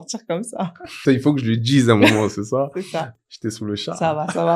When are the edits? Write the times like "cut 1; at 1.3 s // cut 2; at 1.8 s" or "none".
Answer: cut 1; at 1.0 s // cut 2; at 3.1 s